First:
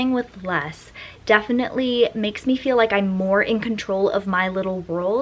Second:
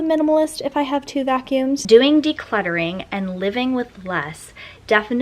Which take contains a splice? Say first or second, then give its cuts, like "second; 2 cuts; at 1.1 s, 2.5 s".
second; 1 cut; at 1.8 s